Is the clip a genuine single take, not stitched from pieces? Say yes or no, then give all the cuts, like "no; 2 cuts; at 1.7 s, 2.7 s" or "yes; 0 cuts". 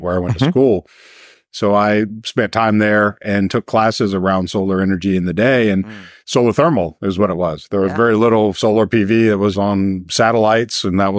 no; 1 cut; at 9.5 s